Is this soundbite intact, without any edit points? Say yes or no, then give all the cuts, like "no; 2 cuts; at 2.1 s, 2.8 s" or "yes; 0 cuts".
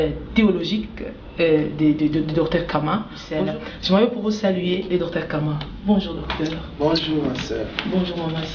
no; 1 cut; at 3.2 s